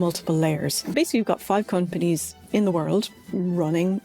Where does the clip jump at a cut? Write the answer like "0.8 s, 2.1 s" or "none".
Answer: 0.9 s